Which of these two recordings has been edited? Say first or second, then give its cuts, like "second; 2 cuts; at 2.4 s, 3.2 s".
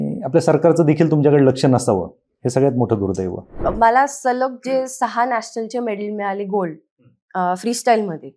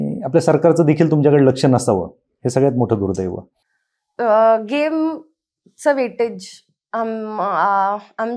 first; 1 cut; at 3.5 s